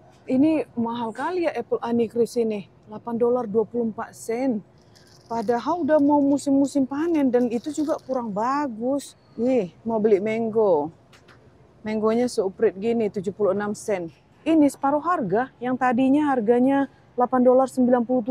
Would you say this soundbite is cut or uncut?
cut